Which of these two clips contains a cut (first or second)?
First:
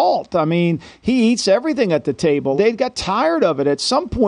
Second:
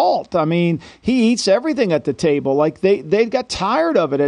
first